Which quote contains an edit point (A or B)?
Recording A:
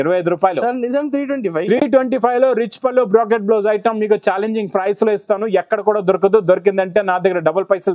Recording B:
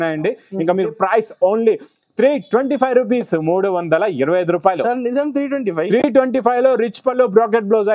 B